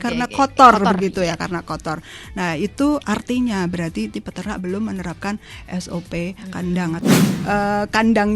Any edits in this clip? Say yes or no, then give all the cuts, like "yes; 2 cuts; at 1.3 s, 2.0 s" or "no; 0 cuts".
yes; 1 cut; at 7.1 s